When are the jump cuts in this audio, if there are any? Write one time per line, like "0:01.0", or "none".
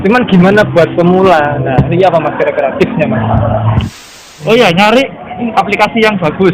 0:04.1
0:05.5

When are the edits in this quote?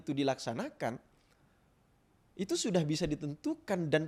none

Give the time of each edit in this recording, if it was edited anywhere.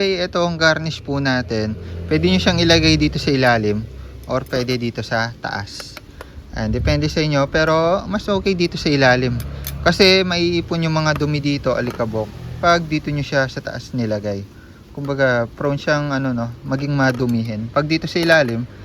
none

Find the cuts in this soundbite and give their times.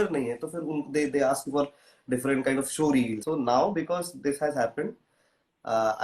0:03.2

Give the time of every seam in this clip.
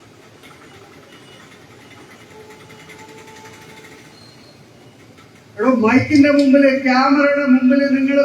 none

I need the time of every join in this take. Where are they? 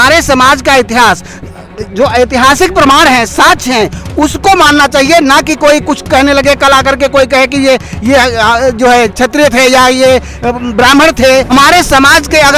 0:11.5

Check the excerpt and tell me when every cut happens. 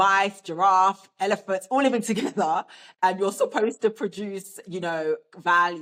none

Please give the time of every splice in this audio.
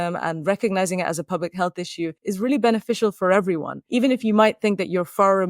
0:02.2
0:03.7

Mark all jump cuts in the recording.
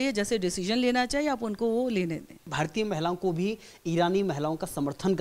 0:02.4

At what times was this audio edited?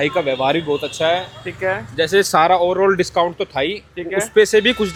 none

